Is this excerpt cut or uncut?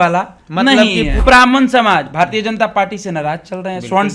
cut